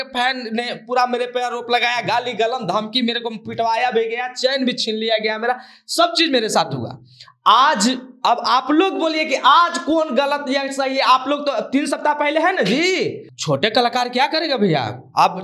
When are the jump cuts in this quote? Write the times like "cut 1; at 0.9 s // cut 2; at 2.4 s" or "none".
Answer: cut 1; at 13.3 s